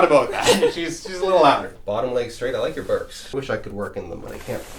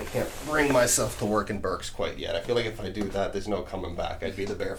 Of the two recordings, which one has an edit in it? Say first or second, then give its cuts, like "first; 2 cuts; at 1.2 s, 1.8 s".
first; 2 cuts; at 1.7 s, 3.3 s